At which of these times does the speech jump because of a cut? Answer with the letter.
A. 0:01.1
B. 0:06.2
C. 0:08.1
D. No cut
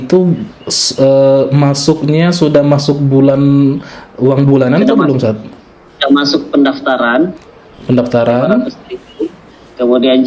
D